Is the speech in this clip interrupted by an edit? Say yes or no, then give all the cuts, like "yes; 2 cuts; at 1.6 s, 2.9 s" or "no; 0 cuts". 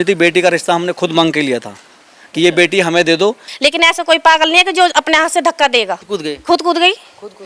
yes; 2 cuts; at 3.5 s, 6.0 s